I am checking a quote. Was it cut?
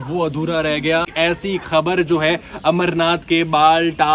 yes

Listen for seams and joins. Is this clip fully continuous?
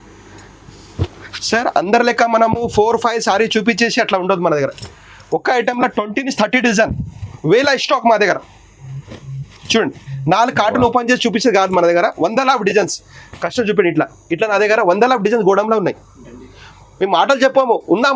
yes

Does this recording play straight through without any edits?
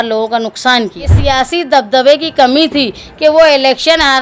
no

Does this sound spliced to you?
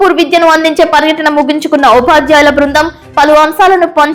no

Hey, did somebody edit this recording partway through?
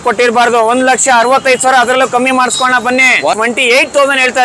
yes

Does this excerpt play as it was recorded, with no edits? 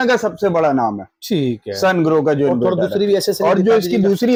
yes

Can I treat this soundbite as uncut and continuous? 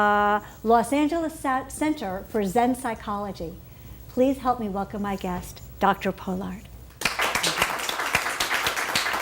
no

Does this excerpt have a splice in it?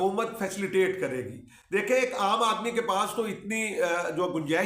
no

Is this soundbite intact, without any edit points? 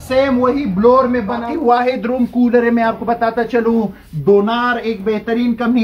no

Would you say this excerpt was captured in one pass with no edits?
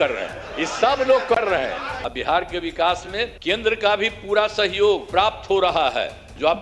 no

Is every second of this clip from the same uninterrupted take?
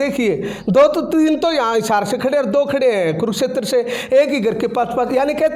yes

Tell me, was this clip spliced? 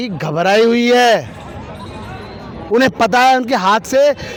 no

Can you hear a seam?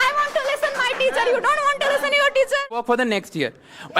yes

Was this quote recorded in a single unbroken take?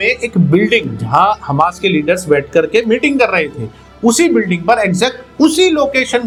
yes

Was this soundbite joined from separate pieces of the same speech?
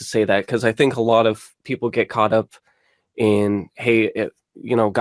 no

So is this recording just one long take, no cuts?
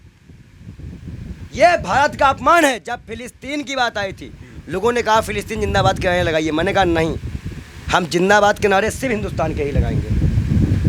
yes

